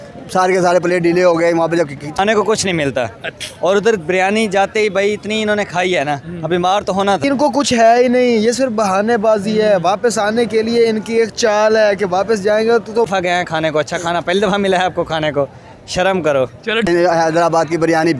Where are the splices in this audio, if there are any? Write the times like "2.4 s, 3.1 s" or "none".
2.1 s, 7.2 s, 13.1 s, 16.9 s

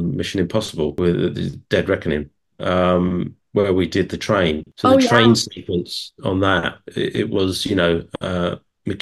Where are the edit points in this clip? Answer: 0.9 s, 4.7 s

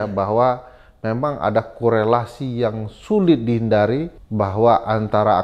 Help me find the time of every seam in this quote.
4.2 s

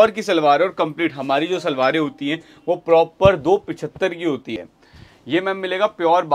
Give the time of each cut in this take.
4.6 s

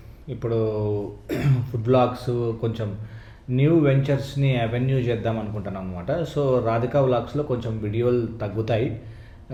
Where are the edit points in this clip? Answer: none

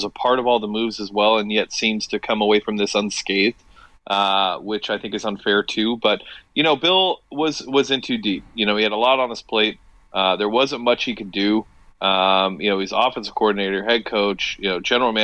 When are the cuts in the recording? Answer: none

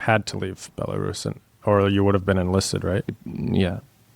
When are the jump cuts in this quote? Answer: 3.2 s

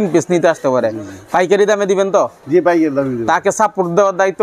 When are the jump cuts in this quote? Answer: none

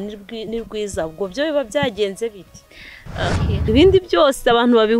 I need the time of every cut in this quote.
3.6 s

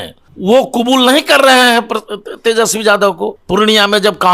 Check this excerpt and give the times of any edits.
3.3 s

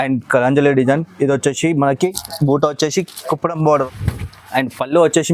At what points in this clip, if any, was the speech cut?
3.8 s

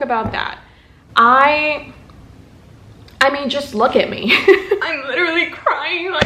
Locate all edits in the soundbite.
4.9 s

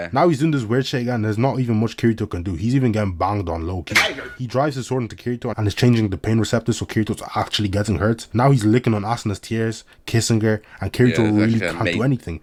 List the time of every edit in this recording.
none

